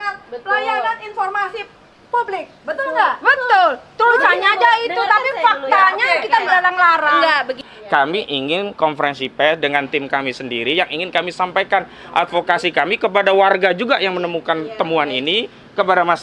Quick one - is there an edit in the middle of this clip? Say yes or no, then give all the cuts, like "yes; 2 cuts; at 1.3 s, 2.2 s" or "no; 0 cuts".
yes; 1 cut; at 7.7 s